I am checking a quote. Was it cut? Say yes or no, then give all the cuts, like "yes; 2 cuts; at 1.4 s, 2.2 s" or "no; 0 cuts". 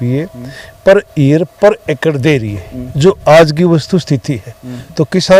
no; 0 cuts